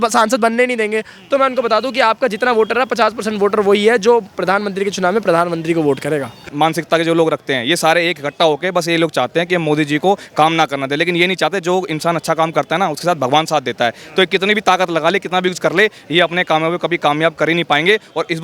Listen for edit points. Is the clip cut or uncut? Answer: cut